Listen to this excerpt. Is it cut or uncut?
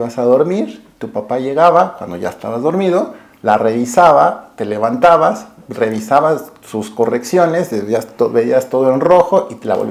uncut